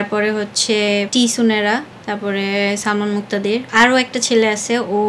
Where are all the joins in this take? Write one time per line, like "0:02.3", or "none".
0:01.1
0:02.0
0:03.7